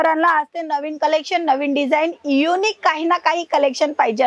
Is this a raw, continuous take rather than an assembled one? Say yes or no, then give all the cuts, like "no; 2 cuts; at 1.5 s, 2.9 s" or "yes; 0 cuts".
yes; 0 cuts